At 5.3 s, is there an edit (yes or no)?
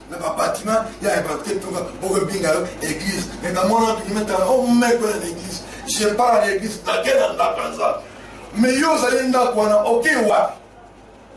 no